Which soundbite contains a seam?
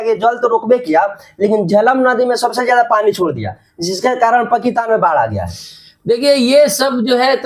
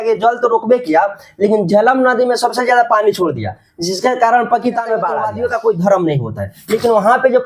second; 1 cut; at 5.3 s

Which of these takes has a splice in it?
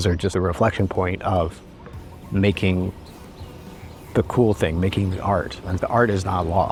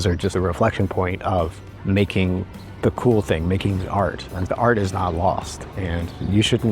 second; 2 cuts; at 1.7 s, 2.6 s

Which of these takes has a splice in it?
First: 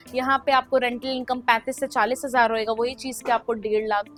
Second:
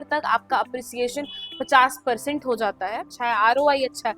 second; 1 cut; at 3.1 s

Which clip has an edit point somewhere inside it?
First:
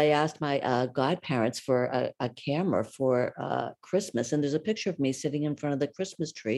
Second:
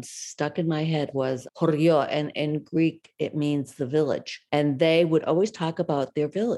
second; 2 cuts; at 1.1 s, 4.3 s

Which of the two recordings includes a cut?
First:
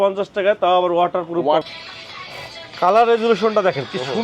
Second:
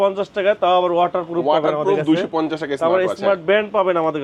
first; 1 cut; at 1.6 s

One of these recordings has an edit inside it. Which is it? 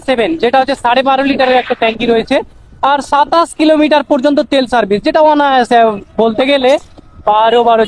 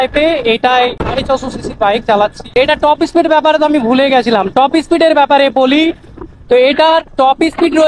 second; 2 cuts; at 1.0 s, 2.5 s

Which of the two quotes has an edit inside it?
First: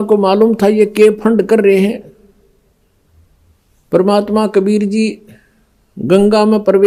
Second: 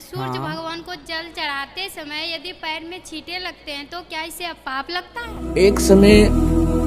second; 1 cut; at 5.5 s

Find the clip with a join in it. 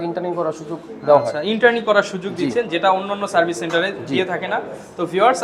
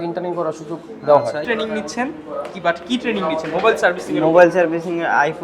second; 1 cut; at 1.4 s

